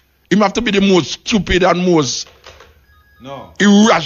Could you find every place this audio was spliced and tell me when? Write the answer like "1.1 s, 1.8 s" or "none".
none